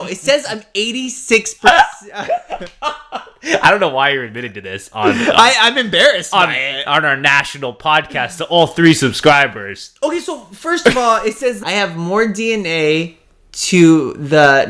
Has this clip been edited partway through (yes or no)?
yes